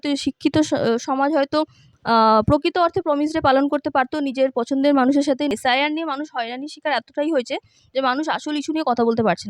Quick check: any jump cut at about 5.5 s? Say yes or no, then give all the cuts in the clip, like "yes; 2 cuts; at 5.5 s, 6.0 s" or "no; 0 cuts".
yes; 1 cut; at 5.5 s